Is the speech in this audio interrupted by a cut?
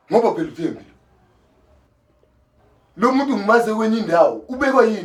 no; 0 cuts

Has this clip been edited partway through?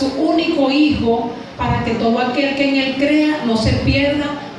no; 0 cuts

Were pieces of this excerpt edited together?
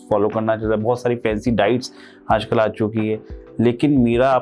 no; 0 cuts

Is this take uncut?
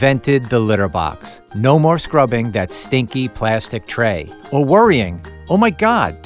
yes; 0 cuts

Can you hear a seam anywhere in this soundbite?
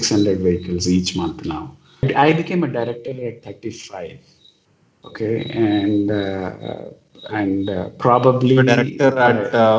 yes; 1 cut; at 2.1 s

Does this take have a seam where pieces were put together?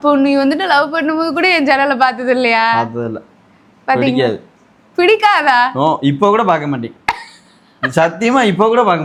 no; 0 cuts

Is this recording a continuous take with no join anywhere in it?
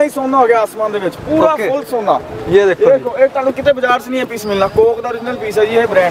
yes; 0 cuts

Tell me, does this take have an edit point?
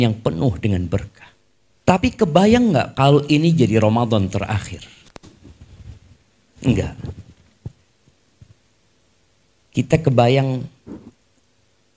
yes; 1 cut; at 2.0 s

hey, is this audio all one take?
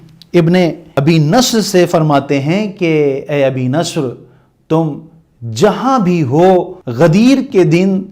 no; 2 cuts; at 0.8 s, 6.8 s

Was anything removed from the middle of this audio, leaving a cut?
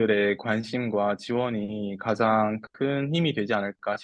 no; 0 cuts

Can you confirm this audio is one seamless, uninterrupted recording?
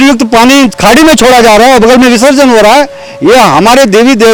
yes; 0 cuts

